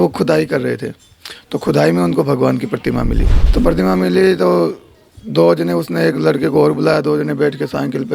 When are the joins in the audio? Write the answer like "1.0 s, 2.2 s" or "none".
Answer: 3.4 s